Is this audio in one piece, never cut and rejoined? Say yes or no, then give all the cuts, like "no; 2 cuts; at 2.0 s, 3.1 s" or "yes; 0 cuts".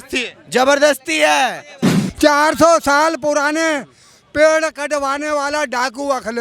no; 1 cut; at 2.0 s